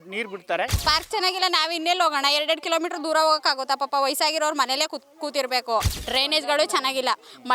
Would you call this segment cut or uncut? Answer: cut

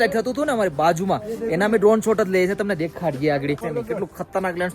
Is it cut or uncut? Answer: cut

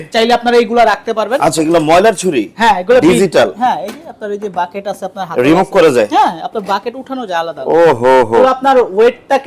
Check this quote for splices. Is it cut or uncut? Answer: cut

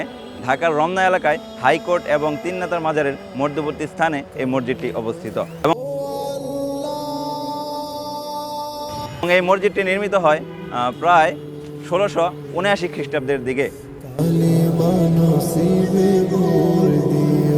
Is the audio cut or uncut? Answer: cut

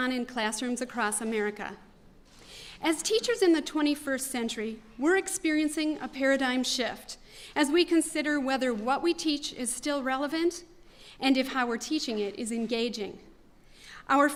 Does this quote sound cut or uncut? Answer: uncut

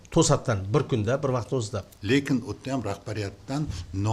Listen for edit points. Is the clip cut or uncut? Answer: cut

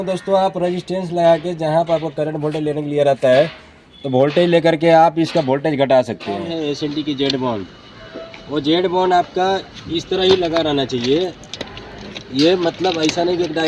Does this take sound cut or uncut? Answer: cut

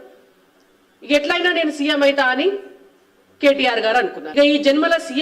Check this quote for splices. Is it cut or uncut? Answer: cut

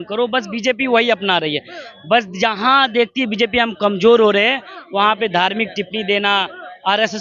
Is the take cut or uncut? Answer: uncut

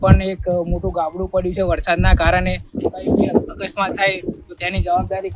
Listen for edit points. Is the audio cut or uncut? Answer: cut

